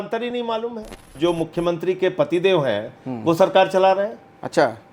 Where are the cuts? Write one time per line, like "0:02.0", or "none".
0:01.1